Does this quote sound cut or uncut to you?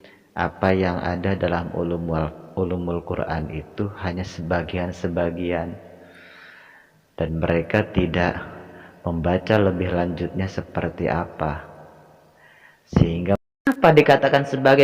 cut